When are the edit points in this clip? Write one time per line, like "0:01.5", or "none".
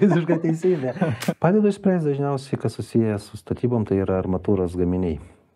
0:01.2